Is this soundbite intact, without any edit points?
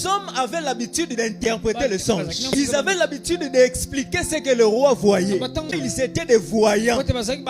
no; 2 cuts; at 2.4 s, 5.8 s

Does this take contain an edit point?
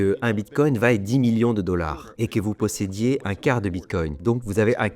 yes; 1 cut; at 2.0 s

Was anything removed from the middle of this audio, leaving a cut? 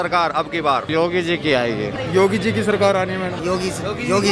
yes; 3 cuts; at 0.9 s, 2.0 s, 3.4 s

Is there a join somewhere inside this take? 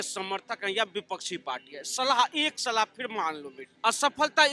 yes; 1 cut; at 3.6 s

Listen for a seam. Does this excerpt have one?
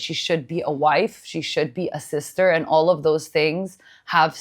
no; 0 cuts

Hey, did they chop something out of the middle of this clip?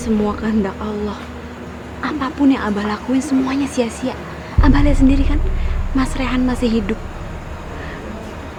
no; 0 cuts

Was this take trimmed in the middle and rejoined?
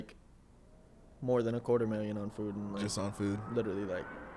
no; 0 cuts

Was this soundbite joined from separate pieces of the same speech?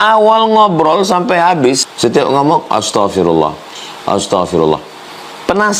yes; 1 cut; at 1.9 s

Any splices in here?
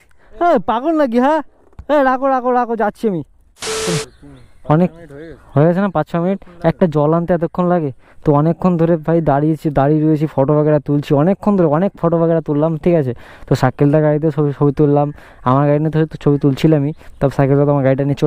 yes; 1 cut; at 3.8 s

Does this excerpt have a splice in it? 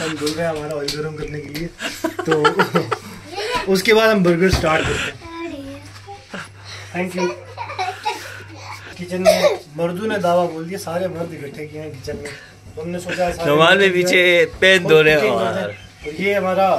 no; 0 cuts

